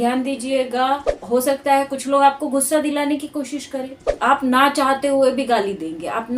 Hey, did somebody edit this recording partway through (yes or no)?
yes